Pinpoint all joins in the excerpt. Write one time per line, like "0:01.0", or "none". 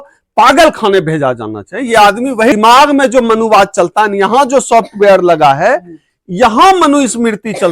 0:02.5